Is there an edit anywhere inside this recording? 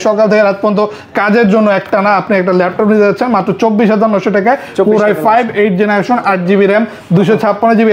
no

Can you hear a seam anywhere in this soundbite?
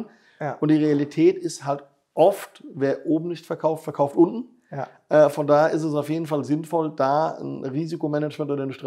no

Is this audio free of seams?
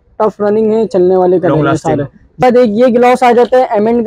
no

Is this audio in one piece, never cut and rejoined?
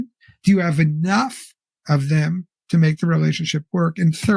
yes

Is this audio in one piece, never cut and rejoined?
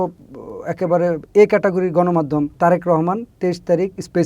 no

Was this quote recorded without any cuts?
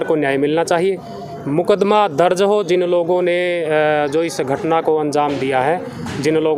yes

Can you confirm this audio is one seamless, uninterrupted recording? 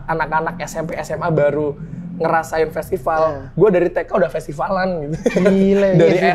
yes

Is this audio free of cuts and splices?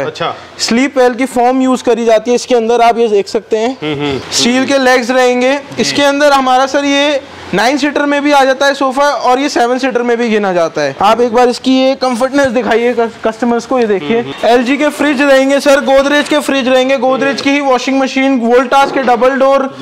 no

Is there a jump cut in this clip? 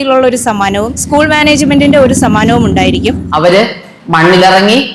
yes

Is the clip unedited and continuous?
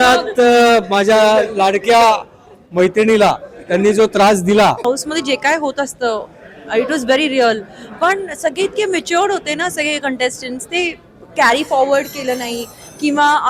no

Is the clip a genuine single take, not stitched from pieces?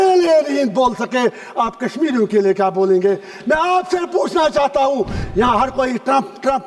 no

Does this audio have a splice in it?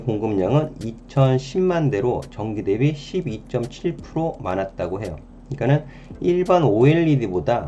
no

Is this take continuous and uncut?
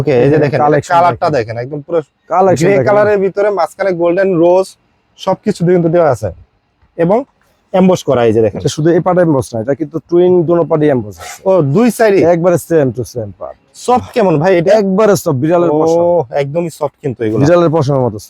yes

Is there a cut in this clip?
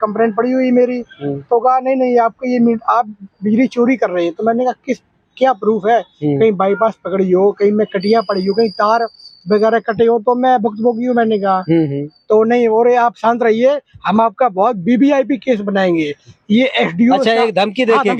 no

